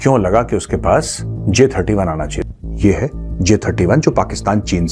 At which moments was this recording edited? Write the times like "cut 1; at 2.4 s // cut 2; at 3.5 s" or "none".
cut 1; at 2.4 s